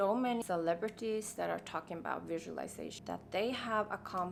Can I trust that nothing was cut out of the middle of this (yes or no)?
yes